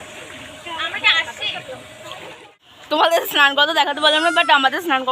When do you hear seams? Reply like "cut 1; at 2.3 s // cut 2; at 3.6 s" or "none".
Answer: cut 1; at 2.4 s